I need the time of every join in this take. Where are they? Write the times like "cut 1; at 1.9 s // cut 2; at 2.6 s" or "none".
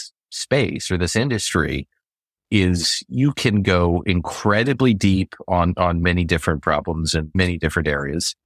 cut 1; at 6.0 s // cut 2; at 7.4 s